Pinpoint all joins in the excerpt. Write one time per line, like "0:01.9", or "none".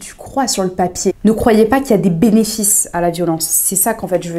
0:01.2